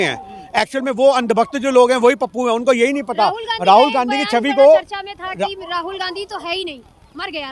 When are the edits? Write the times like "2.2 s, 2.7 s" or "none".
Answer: none